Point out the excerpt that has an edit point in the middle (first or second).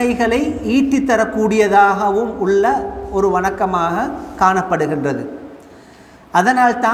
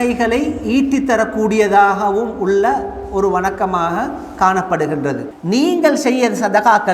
second